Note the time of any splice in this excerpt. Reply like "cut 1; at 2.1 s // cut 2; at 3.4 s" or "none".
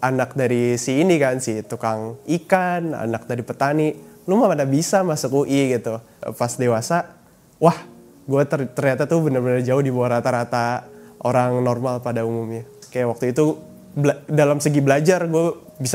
cut 1; at 6.2 s // cut 2; at 12.8 s

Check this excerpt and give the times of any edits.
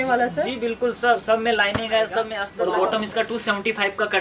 cut 1; at 2.4 s

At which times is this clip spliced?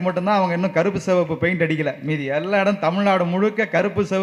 none

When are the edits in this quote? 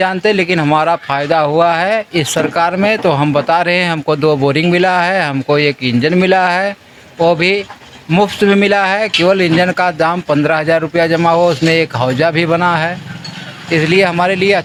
none

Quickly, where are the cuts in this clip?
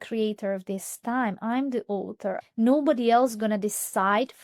cut 1; at 2.4 s

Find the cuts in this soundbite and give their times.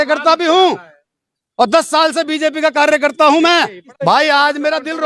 cut 1; at 3.8 s

